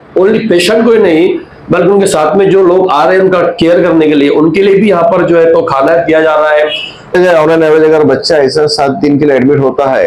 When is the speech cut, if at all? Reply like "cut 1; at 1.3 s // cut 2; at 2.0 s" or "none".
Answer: cut 1; at 7.1 s